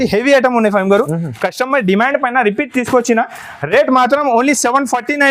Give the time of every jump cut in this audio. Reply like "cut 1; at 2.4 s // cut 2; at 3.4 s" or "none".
none